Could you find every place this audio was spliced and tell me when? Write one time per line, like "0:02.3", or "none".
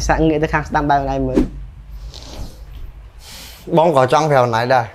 none